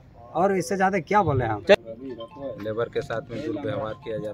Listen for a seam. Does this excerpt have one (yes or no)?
yes